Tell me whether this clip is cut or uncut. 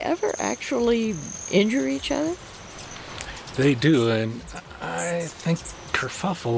uncut